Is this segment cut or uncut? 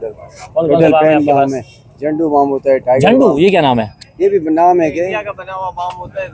uncut